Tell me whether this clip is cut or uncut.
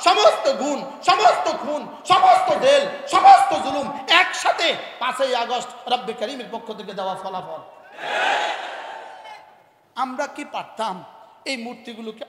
uncut